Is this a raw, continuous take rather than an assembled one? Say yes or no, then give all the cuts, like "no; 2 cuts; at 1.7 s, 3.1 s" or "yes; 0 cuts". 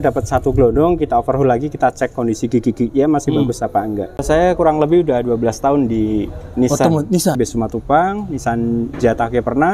no; 2 cuts; at 4.2 s, 7.4 s